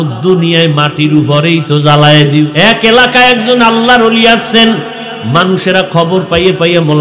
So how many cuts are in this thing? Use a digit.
1